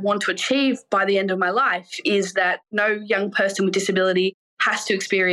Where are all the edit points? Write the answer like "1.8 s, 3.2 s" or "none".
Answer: 0.8 s, 2.6 s